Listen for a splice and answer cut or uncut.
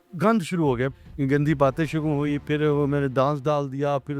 cut